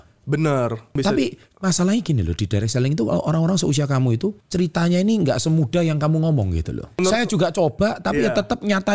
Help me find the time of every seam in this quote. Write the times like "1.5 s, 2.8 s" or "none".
0.9 s, 4.4 s, 7.0 s